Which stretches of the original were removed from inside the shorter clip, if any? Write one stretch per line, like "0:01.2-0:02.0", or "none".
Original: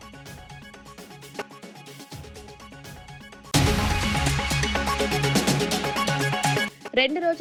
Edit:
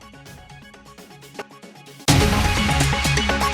0:02.0-0:03.5